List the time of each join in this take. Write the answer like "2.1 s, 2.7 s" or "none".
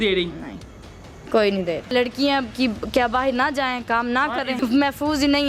1.9 s, 4.6 s